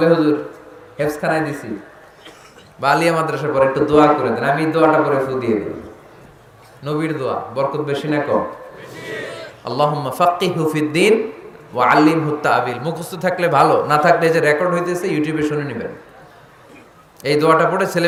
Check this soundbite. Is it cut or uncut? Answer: uncut